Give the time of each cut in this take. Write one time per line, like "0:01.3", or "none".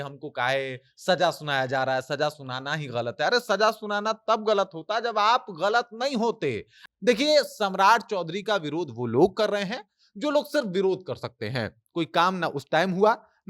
0:06.7